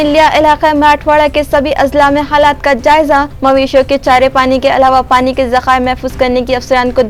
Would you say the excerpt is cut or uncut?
uncut